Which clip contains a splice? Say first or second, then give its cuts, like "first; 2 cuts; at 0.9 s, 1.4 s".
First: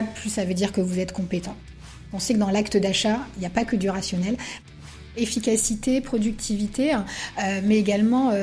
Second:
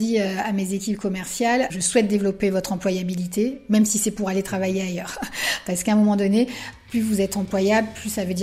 first; 2 cuts; at 1.9 s, 4.5 s